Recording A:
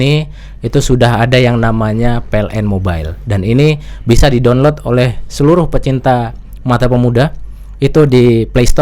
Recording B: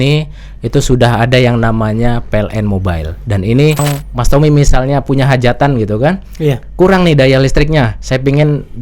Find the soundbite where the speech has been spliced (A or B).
B